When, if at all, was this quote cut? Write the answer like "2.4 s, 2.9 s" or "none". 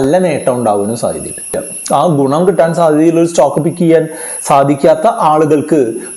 1.6 s